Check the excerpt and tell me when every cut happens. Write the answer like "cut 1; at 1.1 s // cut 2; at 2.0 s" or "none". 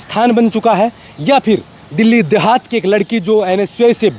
none

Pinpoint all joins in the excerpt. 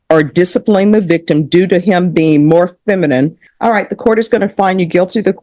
cut 1; at 3.4 s

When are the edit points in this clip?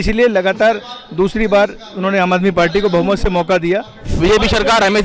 cut 1; at 4.1 s

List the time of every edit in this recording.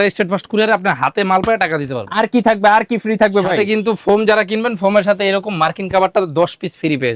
none

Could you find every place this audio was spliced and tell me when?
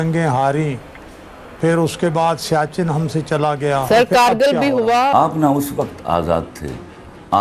cut 1; at 3.8 s // cut 2; at 5.1 s

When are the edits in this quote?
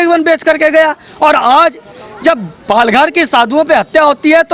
none

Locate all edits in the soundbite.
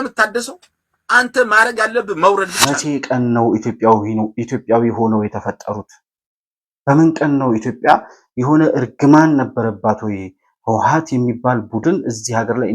cut 1; at 2.8 s

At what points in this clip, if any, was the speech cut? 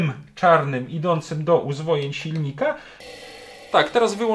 cut 1; at 2.9 s

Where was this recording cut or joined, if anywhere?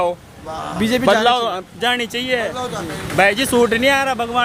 none

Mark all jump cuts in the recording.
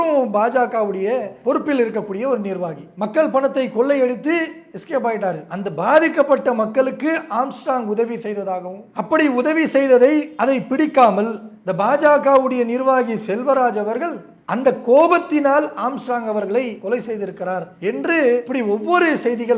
cut 1; at 2.8 s // cut 2; at 5.5 s // cut 3; at 10.3 s // cut 4; at 16.8 s

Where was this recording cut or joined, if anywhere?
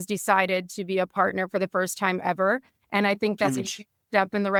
none

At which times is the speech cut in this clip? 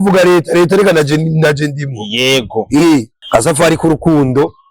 cut 1; at 3.2 s

